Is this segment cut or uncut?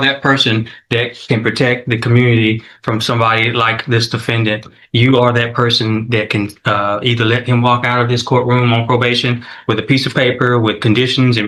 uncut